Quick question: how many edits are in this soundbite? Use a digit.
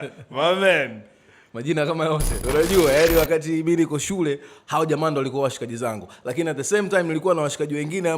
1